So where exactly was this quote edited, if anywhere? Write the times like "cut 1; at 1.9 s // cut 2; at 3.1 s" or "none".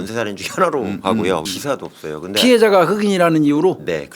cut 1; at 1.4 s